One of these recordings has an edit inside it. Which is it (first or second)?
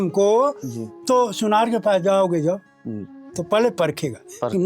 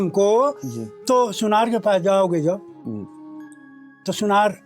first